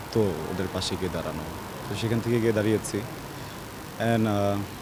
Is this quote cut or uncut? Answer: uncut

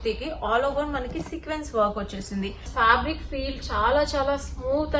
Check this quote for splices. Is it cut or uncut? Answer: cut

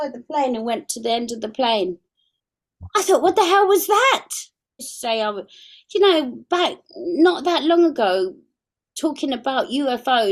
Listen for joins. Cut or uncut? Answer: cut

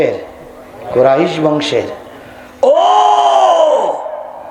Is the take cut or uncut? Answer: uncut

